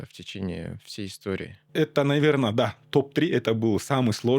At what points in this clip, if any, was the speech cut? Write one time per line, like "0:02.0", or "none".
0:01.6